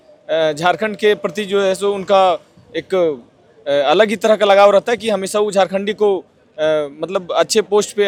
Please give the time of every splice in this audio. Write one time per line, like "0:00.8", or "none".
none